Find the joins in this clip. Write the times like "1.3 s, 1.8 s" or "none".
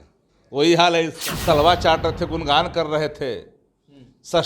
1.2 s

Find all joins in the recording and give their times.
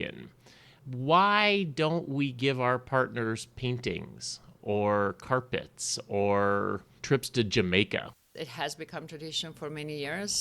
6.9 s, 8.1 s

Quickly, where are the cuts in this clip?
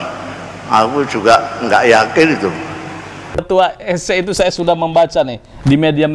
3.4 s

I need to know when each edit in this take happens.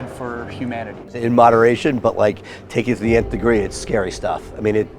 1.2 s

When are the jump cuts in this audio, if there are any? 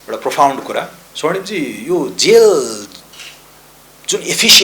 1.0 s

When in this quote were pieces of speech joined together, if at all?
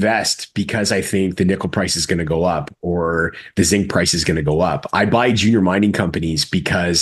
none

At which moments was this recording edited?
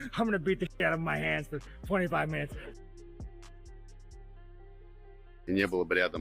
2.7 s, 5.3 s

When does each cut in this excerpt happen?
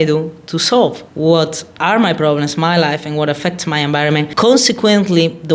4.3 s

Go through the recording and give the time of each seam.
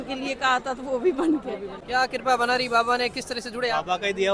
1.7 s

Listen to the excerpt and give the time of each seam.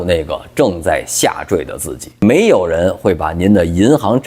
2.1 s

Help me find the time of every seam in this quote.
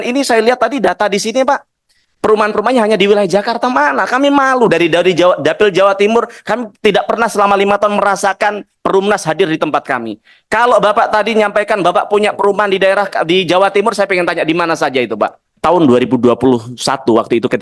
15.5 s

